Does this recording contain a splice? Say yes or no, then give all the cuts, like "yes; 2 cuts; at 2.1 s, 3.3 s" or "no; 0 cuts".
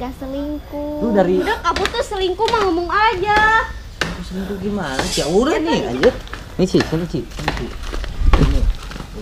yes; 1 cut; at 1.4 s